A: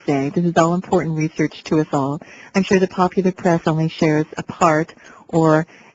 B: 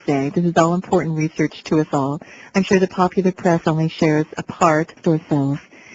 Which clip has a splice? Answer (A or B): A